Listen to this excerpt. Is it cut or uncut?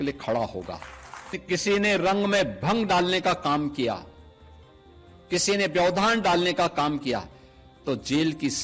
cut